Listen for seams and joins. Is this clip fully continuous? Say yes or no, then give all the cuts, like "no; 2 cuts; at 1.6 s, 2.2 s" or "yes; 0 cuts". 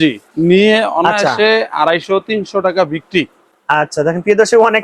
yes; 0 cuts